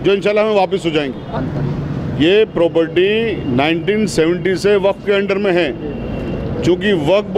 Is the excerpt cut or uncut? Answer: cut